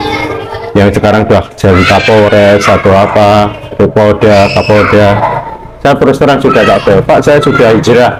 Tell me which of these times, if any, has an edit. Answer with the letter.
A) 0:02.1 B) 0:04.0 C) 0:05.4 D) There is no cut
D